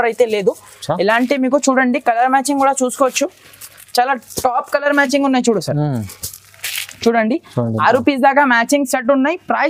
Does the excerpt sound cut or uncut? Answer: uncut